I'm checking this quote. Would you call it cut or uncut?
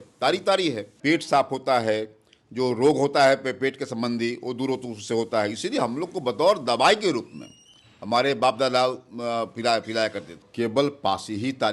cut